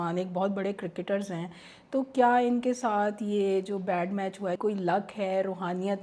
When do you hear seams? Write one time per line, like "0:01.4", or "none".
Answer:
0:04.6